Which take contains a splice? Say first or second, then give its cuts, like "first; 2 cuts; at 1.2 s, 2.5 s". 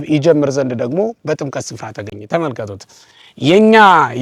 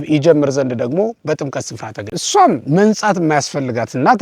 second; 1 cut; at 2.1 s